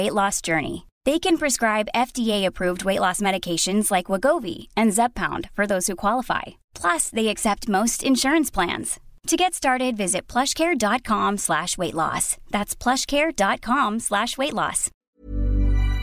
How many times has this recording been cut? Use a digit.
1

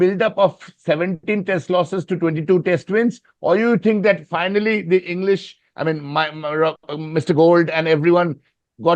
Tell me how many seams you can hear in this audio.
0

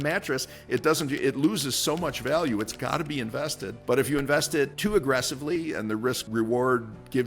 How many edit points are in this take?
3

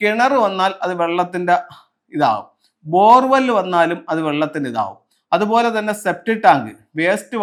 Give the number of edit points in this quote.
0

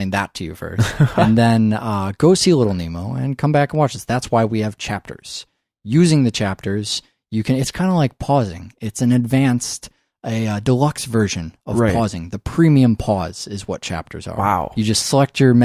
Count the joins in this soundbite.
1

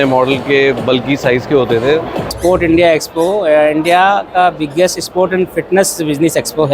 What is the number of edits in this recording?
1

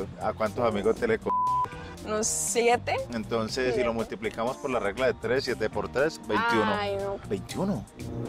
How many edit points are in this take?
2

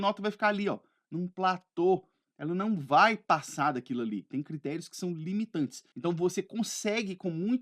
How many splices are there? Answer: 1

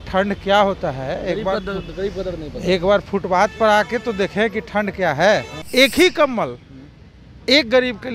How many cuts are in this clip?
1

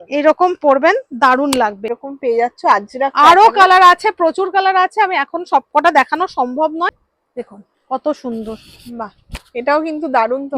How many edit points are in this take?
2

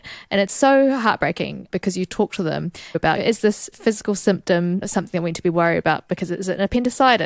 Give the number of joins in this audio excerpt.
1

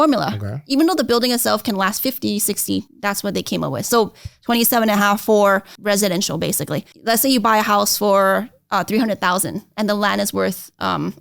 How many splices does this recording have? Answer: 3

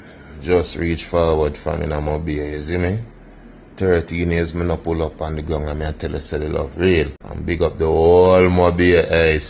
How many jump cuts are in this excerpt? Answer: 1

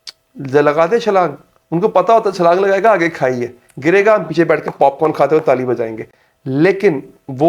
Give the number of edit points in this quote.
0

